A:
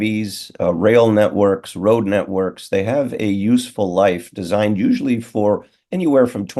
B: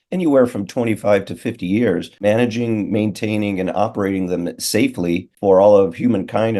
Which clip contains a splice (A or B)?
B